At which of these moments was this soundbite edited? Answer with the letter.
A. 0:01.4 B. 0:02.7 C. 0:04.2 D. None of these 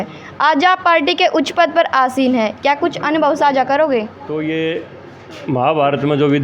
C